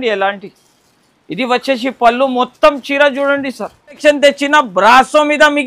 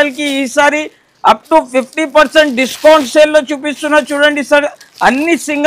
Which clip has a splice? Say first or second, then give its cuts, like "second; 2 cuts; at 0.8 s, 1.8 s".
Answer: first; 1 cut; at 4.0 s